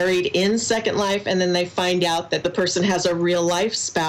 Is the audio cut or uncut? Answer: cut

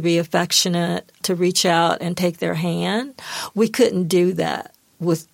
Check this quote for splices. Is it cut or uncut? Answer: cut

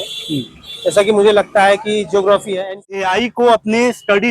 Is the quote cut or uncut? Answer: cut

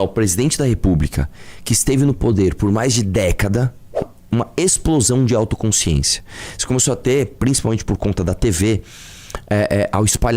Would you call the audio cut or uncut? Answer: cut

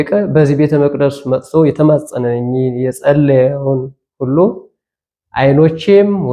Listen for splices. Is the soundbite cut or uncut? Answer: uncut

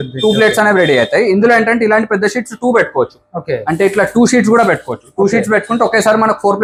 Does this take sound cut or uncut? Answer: uncut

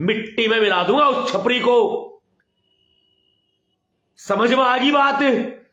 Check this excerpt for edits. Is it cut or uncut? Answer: uncut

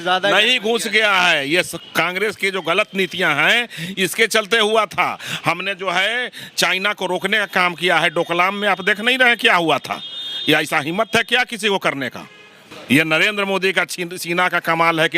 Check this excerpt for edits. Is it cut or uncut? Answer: uncut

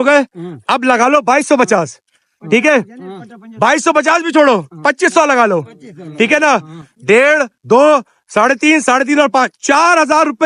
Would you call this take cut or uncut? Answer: uncut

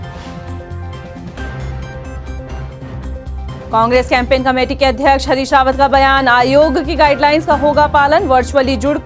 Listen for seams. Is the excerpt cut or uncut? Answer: uncut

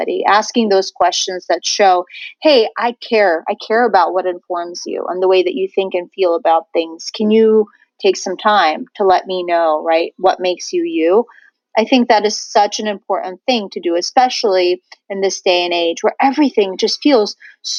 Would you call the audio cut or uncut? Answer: uncut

